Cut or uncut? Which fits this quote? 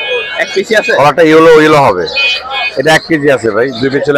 uncut